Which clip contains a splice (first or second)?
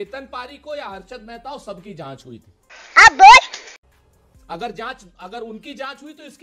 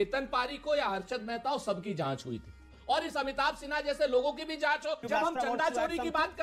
second